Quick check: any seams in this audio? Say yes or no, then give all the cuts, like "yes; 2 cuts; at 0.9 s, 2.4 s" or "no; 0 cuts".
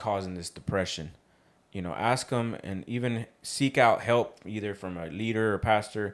no; 0 cuts